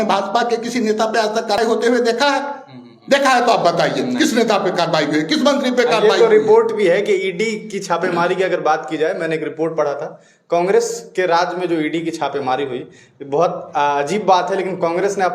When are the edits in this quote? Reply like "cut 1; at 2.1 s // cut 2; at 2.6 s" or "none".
cut 1; at 1.6 s